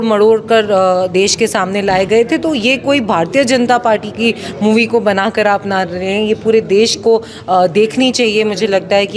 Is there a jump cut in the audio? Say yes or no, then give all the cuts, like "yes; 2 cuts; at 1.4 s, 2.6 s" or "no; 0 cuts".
no; 0 cuts